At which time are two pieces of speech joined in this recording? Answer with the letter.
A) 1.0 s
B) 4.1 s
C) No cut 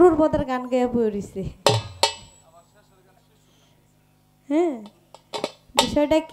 C